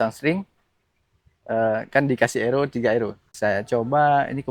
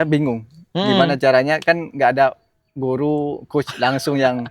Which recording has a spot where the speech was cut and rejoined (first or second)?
first